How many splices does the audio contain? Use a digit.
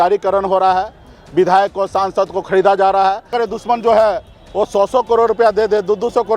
1